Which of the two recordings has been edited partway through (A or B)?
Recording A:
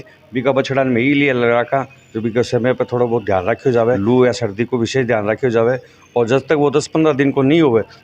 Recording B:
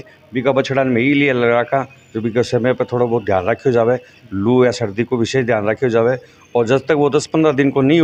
A